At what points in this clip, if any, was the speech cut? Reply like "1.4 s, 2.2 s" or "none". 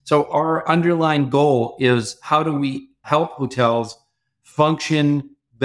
3.0 s